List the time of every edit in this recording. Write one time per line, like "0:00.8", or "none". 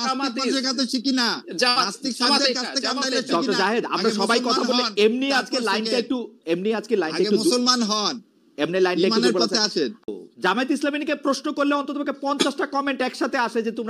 0:10.0